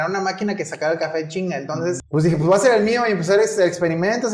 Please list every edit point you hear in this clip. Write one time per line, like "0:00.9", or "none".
0:02.0